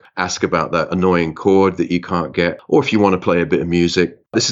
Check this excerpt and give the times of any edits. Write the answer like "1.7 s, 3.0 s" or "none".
2.6 s